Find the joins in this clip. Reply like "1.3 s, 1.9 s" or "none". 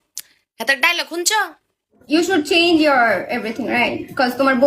1.9 s

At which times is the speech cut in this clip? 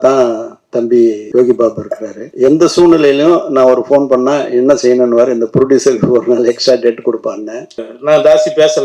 1.2 s, 2.2 s, 7.9 s

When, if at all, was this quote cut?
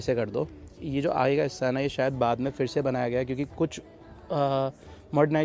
none

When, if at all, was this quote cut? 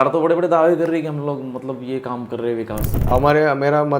2.9 s

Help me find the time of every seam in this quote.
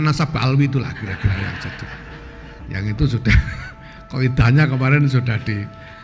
none

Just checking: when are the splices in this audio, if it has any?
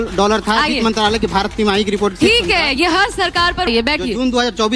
3.7 s

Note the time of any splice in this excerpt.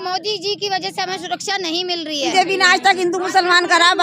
2.2 s

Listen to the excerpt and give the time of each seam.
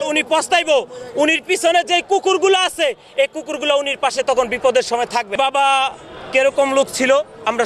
5.3 s

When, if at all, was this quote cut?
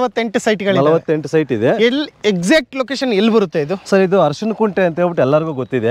none

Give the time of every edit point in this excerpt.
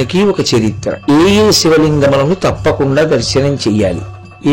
1.1 s

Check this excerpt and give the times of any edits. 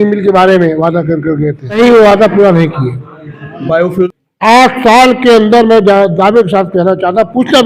1.8 s, 4.1 s

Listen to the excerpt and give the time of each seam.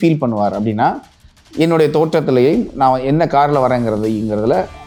none

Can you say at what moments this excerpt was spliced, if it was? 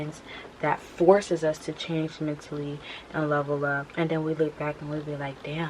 3.8 s

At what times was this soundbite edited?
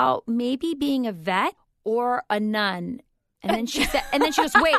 1.7 s

